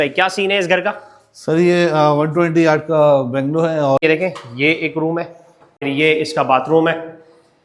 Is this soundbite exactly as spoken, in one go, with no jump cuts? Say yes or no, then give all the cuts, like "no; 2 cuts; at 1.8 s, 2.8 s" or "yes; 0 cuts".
no; 2 cuts; at 4.0 s, 5.9 s